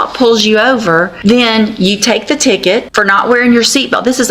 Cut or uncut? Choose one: cut